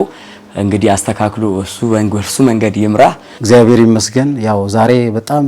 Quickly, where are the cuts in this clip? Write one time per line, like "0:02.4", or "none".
0:03.3